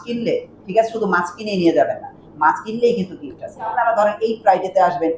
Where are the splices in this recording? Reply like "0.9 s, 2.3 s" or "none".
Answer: 3.7 s